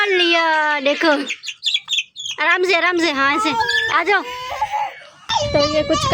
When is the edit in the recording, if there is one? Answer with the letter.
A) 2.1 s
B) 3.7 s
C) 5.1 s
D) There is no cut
C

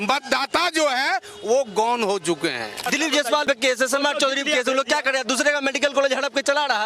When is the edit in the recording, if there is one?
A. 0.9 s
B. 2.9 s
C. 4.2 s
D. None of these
B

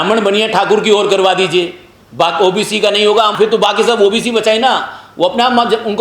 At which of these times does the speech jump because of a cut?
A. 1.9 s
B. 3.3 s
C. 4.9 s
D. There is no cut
B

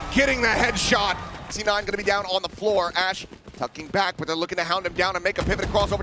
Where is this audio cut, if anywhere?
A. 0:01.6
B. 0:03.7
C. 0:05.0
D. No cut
A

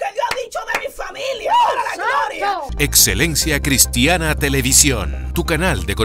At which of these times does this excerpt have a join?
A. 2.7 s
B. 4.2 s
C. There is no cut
A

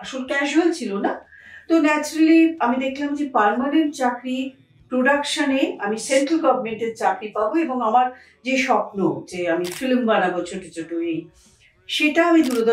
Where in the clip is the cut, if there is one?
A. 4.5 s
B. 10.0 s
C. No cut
C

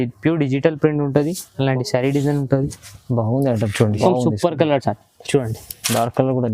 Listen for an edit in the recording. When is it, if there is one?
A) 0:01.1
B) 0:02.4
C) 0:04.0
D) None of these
C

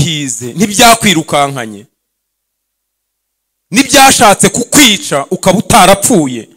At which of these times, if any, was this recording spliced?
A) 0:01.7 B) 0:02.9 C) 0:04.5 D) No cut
D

